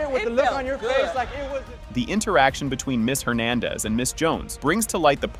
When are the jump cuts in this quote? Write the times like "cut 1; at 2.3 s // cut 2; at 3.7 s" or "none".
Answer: none